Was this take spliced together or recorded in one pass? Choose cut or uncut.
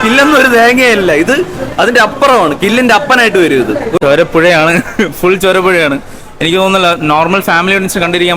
cut